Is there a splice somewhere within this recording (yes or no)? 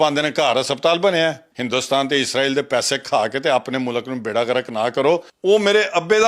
yes